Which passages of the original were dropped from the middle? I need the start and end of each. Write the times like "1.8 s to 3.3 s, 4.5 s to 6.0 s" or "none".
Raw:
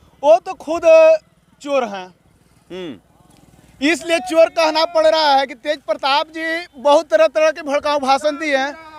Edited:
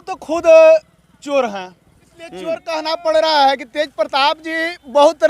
3.0 s to 4.6 s